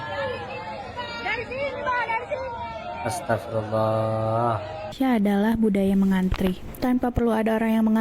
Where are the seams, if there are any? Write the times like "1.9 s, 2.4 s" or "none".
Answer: 4.9 s

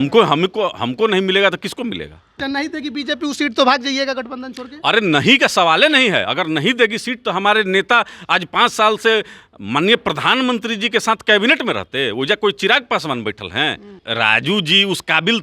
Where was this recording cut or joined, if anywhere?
2.4 s, 14.0 s

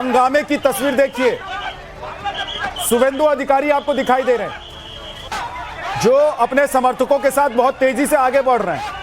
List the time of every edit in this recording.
1.4 s

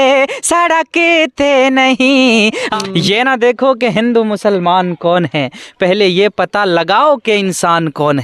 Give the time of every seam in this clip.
2.6 s

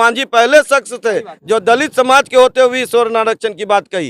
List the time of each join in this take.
none

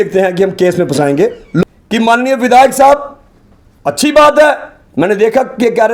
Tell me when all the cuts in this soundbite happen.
1.6 s

